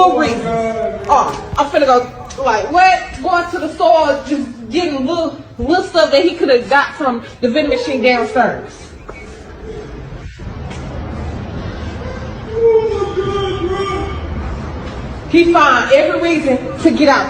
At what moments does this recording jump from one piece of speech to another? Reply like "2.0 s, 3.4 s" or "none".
9.9 s